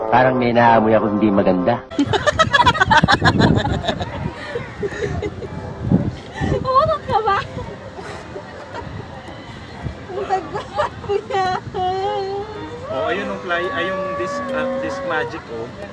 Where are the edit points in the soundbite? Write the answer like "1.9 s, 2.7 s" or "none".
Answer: 1.8 s